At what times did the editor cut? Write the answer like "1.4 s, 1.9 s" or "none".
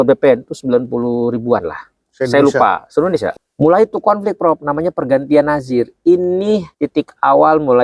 3.3 s, 6.8 s